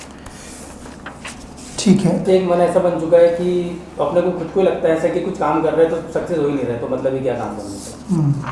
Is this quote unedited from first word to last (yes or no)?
no